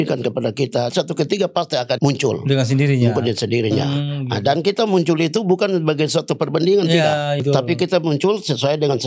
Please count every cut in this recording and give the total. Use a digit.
3